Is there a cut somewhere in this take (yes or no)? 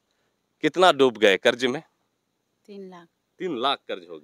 no